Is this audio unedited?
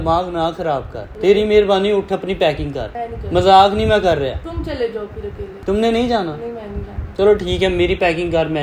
yes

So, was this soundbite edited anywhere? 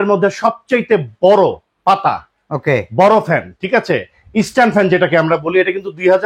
no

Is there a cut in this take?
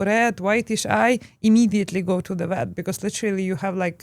no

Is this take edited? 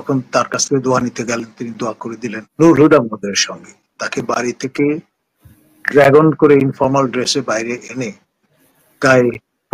yes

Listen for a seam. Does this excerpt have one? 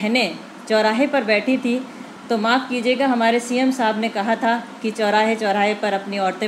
no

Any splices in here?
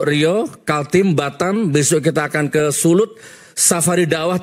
no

